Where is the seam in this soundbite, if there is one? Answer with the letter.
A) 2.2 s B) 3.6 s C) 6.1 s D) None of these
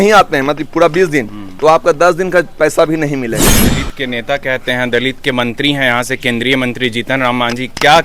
B